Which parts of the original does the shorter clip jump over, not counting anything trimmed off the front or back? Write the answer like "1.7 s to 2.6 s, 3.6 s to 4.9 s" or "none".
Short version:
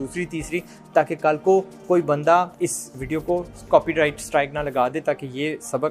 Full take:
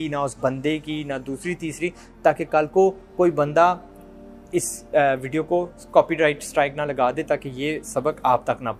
4.3 s to 5.2 s